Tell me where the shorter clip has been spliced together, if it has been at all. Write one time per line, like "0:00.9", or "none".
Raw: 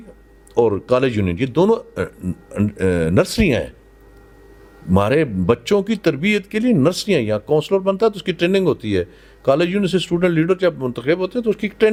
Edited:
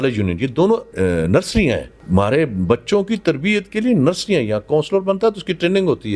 0:00.9
0:01.9